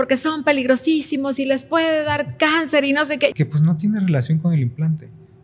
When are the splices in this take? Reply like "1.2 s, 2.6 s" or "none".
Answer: 3.3 s